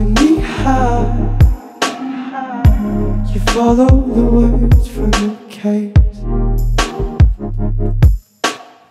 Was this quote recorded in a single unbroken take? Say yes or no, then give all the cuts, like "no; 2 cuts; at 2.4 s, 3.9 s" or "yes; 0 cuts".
yes; 0 cuts